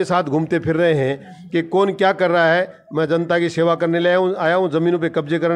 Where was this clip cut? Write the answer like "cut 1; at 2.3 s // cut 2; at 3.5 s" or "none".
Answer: none